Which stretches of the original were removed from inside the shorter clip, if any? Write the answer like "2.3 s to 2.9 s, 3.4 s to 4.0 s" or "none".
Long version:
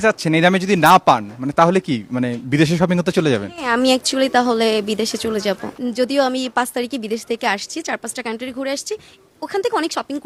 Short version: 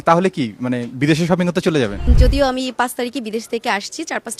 3.5 s to 5.8 s